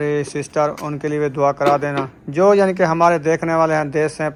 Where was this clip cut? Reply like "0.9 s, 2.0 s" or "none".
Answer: none